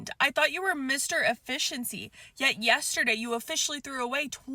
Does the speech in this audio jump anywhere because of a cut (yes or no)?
no